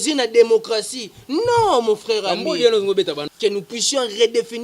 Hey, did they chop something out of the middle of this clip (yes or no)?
yes